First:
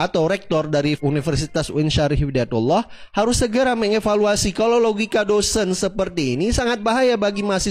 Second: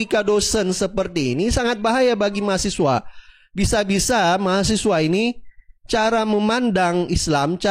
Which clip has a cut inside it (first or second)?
first